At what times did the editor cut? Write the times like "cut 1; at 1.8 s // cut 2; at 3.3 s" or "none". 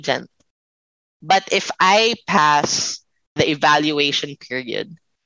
cut 1; at 3.4 s